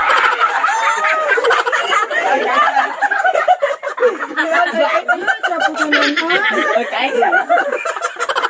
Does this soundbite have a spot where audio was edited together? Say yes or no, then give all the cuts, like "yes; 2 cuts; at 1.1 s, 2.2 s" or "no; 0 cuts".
no; 0 cuts